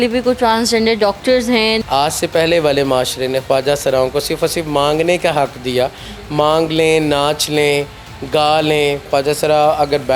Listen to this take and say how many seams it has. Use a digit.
2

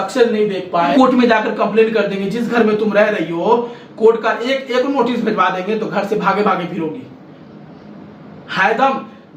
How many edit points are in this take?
1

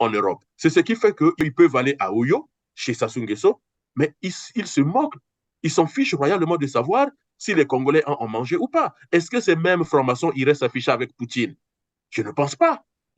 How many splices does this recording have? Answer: 1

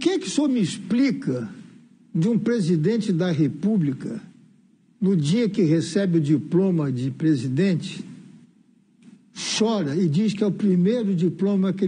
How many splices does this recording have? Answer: 0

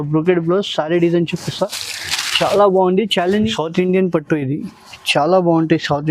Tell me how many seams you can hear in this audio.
1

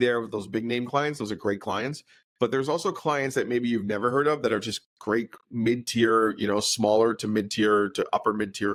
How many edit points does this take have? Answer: 0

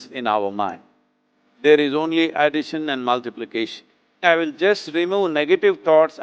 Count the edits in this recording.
1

